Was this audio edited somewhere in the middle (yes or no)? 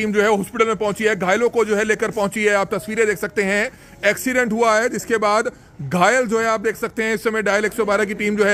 no